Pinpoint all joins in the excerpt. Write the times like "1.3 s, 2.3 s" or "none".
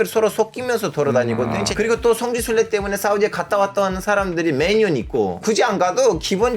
1.7 s, 5.4 s